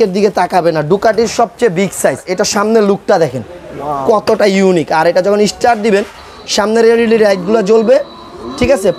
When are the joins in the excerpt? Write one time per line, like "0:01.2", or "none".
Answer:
0:02.3